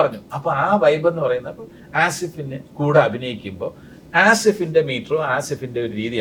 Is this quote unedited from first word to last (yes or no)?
yes